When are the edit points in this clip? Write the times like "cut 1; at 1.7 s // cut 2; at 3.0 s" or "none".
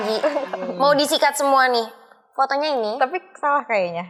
none